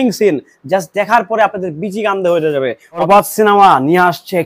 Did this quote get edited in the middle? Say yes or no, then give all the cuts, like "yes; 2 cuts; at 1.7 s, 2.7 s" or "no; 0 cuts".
yes; 1 cut; at 2.8 s